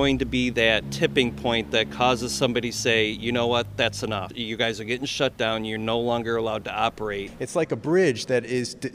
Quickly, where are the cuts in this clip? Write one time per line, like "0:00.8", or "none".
0:00.9
0:04.3
0:07.3